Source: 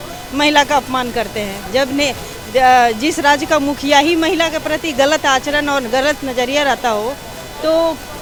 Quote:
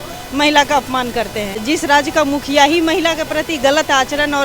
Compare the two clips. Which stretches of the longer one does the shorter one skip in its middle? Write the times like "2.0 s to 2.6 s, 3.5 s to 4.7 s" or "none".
1.6 s to 3.0 s